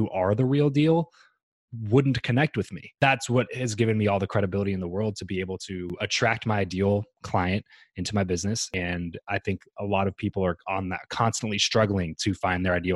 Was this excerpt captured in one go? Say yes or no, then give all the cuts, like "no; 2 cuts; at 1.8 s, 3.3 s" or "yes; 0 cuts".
no; 3 cuts; at 2.8 s, 5.9 s, 8.7 s